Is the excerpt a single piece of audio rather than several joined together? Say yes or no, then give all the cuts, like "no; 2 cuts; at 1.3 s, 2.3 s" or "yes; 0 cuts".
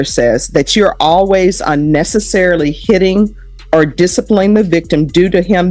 yes; 0 cuts